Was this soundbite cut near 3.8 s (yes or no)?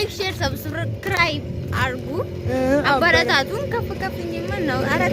no